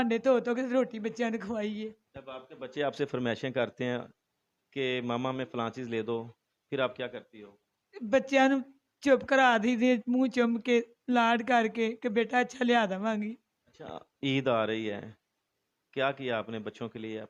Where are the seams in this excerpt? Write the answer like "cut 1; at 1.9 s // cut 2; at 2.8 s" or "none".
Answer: none